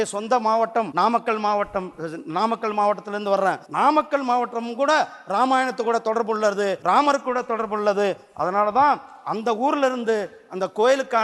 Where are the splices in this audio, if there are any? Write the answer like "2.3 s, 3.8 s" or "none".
0.9 s, 3.6 s, 6.8 s